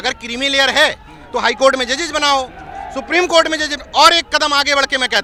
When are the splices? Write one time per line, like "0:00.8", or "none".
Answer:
none

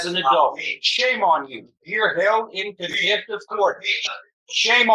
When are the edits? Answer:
0:04.1

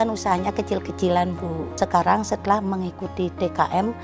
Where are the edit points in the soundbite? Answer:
0:01.7

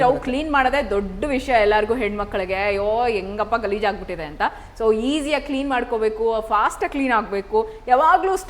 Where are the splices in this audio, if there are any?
none

